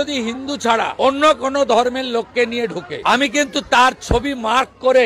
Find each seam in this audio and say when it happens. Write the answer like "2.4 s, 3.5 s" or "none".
2.9 s

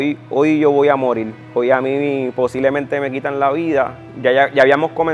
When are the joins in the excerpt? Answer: 4.0 s

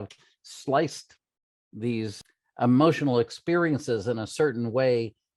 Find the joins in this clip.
2.2 s

